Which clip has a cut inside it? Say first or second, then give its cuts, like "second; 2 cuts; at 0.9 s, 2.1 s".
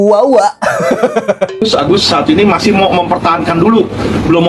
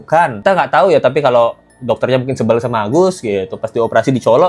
first; 1 cut; at 1.6 s